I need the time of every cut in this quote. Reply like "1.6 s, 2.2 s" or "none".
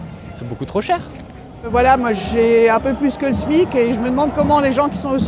1.7 s